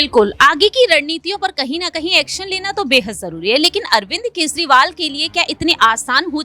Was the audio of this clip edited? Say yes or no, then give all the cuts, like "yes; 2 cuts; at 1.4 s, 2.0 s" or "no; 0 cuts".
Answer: no; 0 cuts